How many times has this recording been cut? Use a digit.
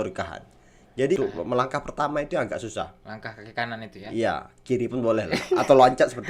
1